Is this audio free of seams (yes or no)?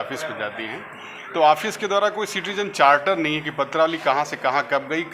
yes